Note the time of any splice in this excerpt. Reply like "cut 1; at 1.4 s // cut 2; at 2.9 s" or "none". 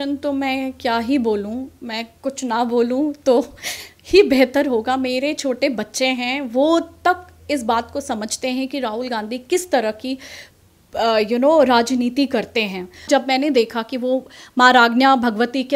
cut 1; at 13.1 s